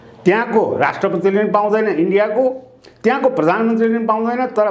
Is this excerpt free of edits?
yes; 0 cuts

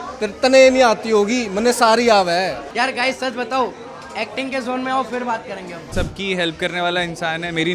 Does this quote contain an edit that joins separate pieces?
yes; 2 cuts; at 2.6 s, 5.9 s

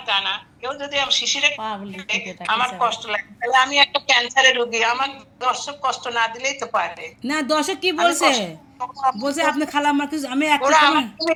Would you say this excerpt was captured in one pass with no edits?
yes; 0 cuts

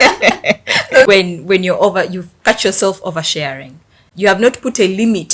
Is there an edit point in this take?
yes; 2 cuts; at 1.1 s, 4.0 s

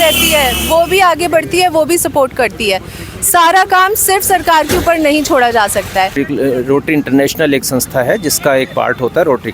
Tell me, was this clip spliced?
yes; 1 cut; at 6.2 s

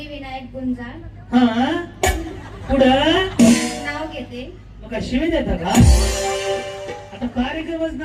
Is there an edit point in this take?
no; 0 cuts

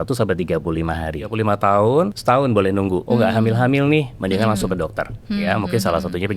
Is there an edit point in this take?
yes; 3 cuts; at 1.3 s, 2.2 s, 3.0 s

